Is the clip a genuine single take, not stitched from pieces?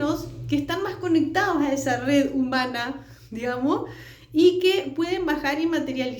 yes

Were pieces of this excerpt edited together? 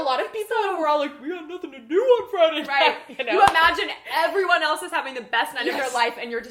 no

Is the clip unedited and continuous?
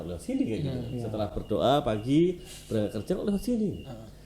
yes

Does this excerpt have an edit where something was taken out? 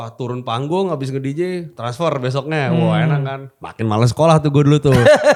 no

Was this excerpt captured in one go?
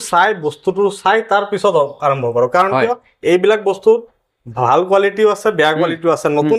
yes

